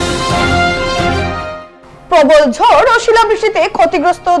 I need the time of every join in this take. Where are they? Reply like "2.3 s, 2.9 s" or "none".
1.5 s